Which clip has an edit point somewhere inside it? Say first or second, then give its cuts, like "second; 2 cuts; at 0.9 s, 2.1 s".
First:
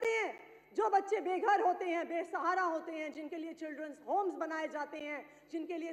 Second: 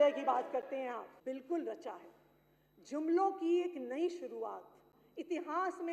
second; 1 cut; at 1.1 s